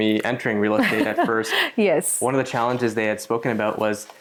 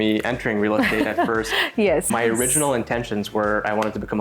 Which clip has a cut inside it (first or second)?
second